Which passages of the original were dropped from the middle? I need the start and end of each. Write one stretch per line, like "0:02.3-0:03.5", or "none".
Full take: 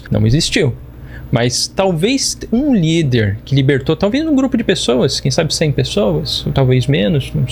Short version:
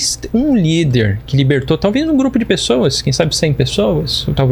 none